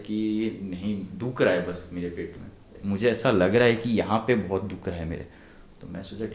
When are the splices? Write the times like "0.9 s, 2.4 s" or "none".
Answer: 2.7 s